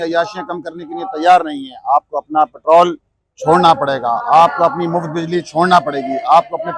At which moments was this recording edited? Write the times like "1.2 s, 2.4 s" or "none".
none